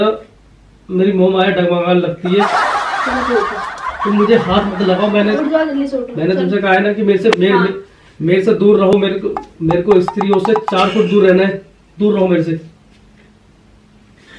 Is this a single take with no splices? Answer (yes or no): yes